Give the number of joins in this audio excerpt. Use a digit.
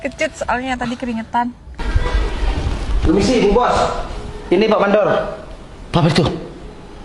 1